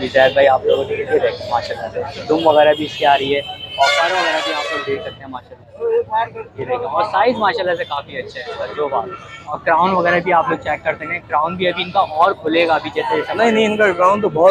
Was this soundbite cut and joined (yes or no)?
no